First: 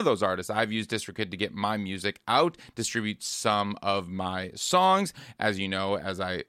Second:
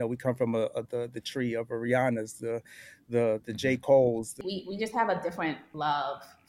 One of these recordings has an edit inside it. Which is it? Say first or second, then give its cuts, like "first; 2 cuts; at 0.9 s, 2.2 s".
second; 2 cuts; at 4.3 s, 5.7 s